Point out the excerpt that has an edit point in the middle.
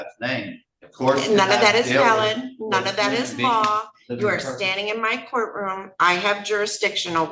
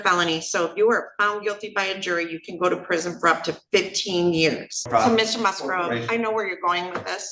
second; 1 cut; at 4.9 s

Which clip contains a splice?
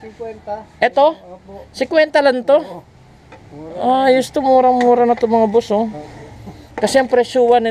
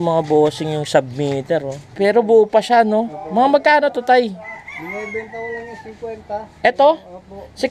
second; 1 cut; at 1.8 s

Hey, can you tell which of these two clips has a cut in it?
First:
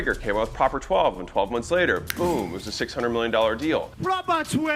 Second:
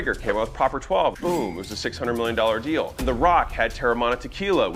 second; 2 cuts; at 1.2 s, 3.0 s

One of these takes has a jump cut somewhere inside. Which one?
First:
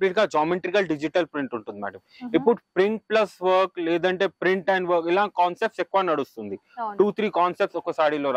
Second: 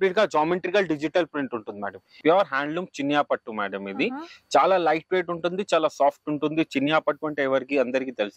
second; 1 cut; at 2.1 s

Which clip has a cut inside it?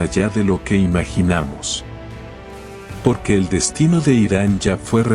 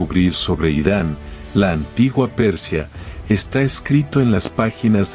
first; 2 cuts; at 1.6 s, 3.0 s

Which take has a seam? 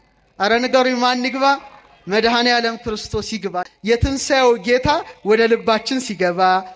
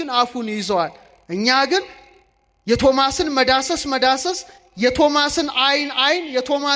first; 1 cut; at 3.7 s

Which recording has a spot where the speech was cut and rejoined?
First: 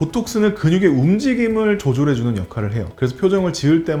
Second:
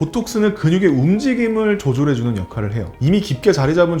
second; 1 cut; at 2.9 s

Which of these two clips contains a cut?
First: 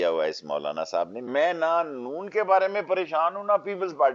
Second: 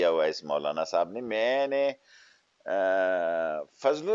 first; 1 cut; at 1.3 s

